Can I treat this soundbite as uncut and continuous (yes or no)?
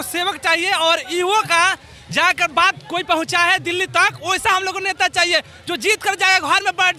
yes